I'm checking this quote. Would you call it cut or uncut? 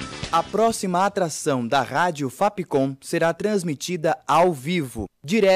uncut